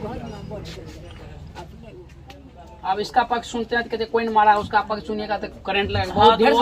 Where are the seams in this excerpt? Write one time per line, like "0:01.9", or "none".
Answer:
0:02.5